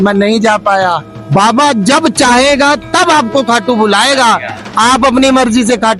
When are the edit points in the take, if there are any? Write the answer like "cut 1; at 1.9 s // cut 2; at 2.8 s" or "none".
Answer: cut 1; at 1.1 s